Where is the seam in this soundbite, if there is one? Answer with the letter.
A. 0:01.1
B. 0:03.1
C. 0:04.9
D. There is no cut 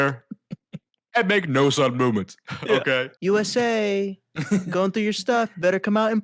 B